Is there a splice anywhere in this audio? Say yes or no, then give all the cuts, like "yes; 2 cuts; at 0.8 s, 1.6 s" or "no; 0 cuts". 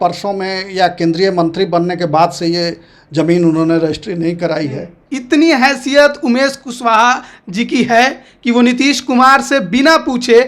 yes; 1 cut; at 5.1 s